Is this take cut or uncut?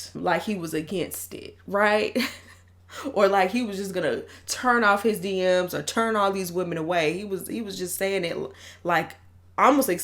uncut